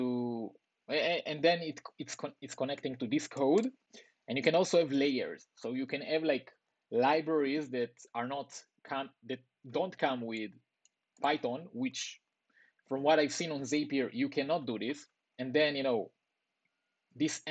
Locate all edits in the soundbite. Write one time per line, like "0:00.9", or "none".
none